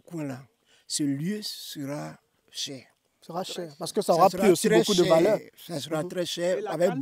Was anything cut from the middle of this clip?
no; 0 cuts

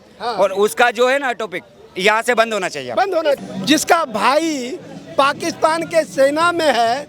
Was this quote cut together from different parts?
yes; 1 cut; at 3.4 s

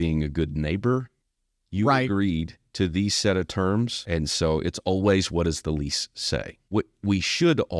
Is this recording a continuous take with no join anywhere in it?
no; 3 cuts; at 1.1 s, 4.0 s, 6.6 s

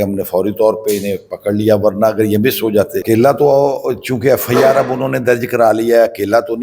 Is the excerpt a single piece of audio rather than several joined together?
no; 1 cut; at 3.0 s

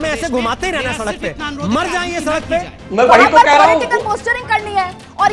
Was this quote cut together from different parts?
yes; 1 cut; at 2.8 s

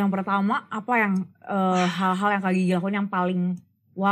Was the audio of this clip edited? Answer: no; 0 cuts

